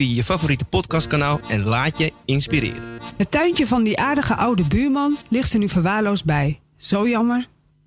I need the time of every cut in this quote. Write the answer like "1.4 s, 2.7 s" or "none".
3.0 s